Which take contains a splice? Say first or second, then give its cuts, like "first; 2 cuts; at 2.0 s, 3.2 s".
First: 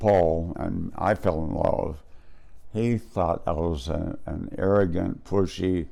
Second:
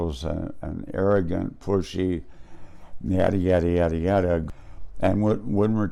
second; 1 cut; at 4.4 s